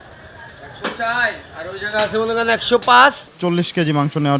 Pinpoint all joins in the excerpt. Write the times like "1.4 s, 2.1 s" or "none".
3.3 s